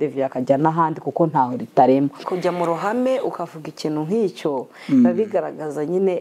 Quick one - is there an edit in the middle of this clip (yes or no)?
yes